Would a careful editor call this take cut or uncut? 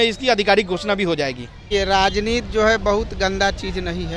cut